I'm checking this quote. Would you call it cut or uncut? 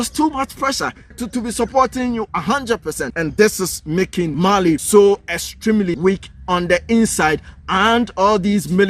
cut